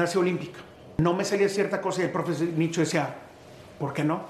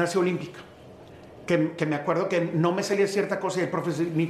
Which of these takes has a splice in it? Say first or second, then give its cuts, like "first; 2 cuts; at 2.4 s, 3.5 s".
first; 1 cut; at 0.9 s